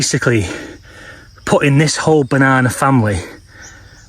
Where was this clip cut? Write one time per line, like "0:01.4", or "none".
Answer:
none